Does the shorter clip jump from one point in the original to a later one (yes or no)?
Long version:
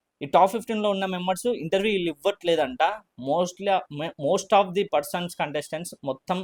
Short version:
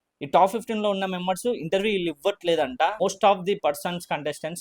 yes